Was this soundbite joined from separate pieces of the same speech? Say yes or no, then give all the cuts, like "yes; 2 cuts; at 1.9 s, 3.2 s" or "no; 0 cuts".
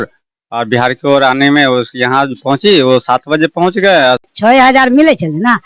yes; 1 cut; at 4.3 s